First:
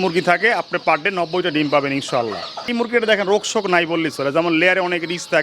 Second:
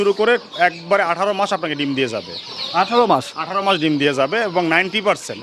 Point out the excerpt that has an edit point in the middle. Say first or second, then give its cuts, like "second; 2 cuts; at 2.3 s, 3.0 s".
first; 1 cut; at 2.7 s